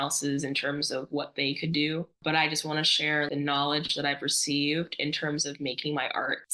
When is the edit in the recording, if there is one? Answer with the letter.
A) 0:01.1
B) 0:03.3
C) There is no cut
B